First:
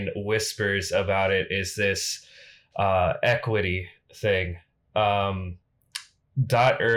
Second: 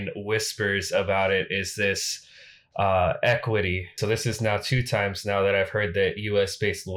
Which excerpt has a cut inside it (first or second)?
second